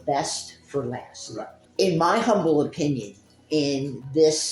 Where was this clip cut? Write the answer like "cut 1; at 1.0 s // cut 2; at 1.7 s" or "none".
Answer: cut 1; at 1.6 s